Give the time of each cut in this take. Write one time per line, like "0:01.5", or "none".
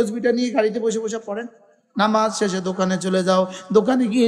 0:01.8